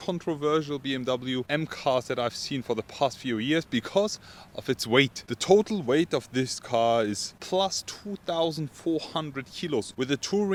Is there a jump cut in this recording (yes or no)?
no